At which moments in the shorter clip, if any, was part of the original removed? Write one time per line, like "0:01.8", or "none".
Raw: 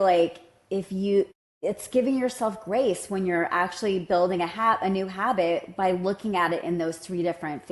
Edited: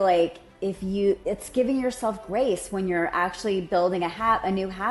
0:00.9